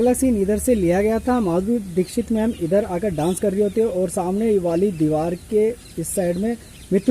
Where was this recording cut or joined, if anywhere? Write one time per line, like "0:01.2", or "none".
none